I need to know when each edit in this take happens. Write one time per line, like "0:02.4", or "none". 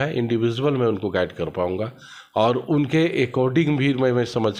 none